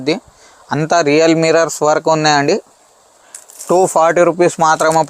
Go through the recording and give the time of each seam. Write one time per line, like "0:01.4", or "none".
none